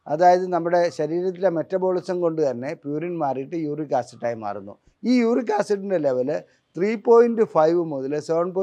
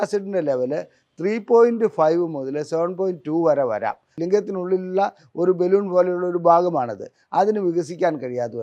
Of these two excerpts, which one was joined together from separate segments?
second; 1 cut; at 4.1 s

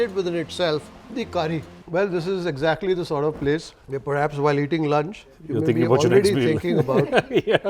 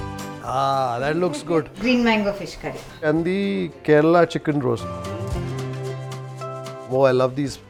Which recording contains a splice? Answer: first; 1 cut; at 1.7 s

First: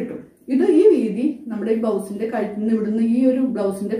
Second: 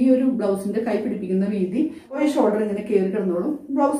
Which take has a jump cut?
second; 1 cut; at 2.2 s

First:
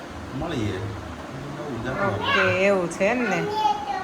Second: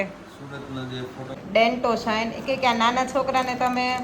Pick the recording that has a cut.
second; 1 cut; at 1.4 s

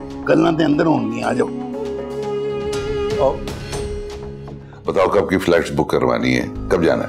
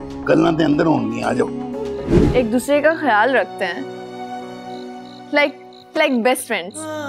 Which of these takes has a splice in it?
second; 1 cut; at 2.2 s

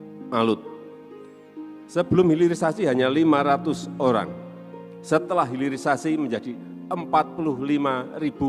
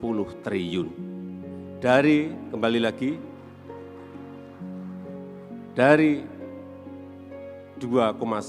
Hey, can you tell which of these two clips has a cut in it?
second; 2 cuts; at 3.8 s, 5.6 s

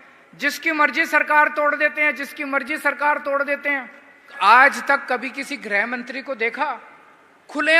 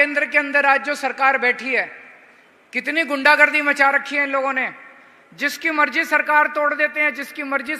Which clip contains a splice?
first; 1 cut; at 4.3 s

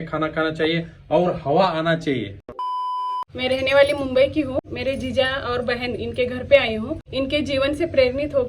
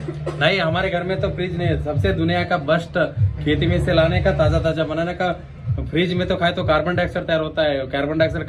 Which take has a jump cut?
first; 3 cuts; at 2.9 s, 4.6 s, 7.0 s

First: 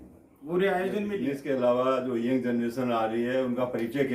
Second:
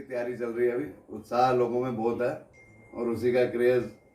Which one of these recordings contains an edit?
first; 1 cut; at 1.2 s

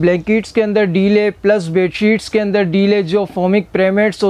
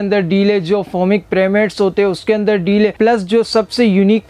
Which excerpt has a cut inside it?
second; 1 cut; at 2.9 s

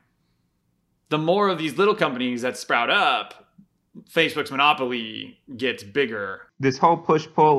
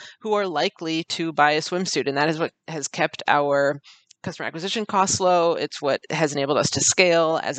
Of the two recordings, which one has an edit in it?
first; 1 cut; at 6.4 s

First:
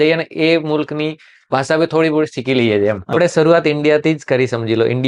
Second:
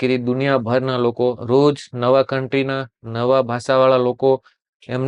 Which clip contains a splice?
first; 1 cut; at 3.2 s

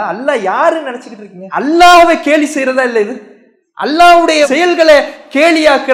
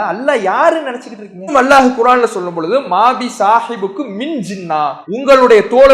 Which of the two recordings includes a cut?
second; 2 cuts; at 1.5 s, 5.0 s

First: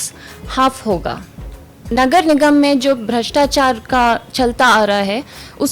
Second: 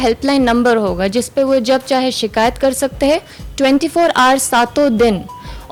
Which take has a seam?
first; 1 cut; at 1.8 s

